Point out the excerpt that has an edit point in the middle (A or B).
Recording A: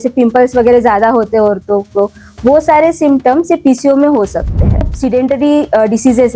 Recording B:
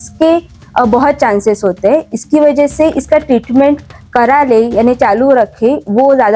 A